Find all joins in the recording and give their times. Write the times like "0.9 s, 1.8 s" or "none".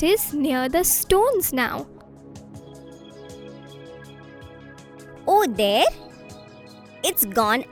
none